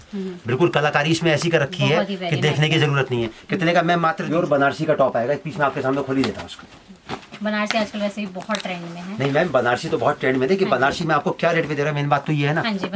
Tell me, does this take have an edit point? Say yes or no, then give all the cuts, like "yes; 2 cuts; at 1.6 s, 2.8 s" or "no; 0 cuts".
yes; 1 cut; at 4.2 s